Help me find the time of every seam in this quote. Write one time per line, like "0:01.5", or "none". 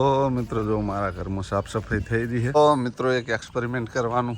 0:02.6